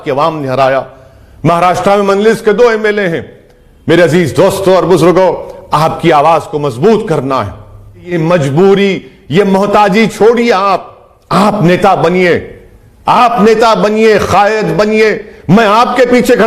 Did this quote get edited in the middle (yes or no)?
yes